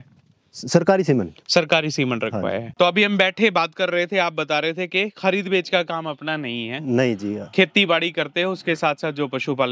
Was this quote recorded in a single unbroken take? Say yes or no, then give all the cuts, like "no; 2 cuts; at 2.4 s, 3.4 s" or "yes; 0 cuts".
no; 1 cut; at 2.6 s